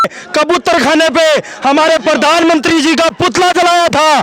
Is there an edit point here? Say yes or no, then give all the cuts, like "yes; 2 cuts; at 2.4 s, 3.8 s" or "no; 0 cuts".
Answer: no; 0 cuts